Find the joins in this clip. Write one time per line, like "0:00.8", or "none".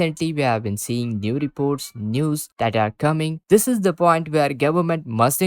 0:03.4